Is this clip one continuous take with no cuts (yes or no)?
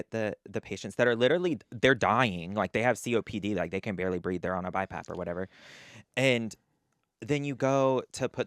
yes